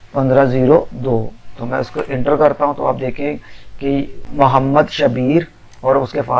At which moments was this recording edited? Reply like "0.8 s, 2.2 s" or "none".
4.2 s